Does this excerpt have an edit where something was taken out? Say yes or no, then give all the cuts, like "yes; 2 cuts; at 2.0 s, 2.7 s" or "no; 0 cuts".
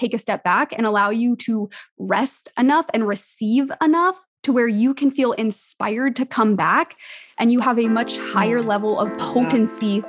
no; 0 cuts